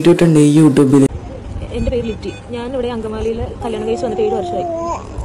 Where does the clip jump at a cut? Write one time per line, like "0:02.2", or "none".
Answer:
0:01.1